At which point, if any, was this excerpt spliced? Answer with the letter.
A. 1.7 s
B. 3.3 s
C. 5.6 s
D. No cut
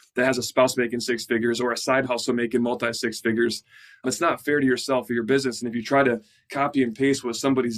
D